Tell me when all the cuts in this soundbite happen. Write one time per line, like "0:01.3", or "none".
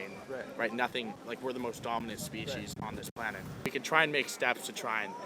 0:03.7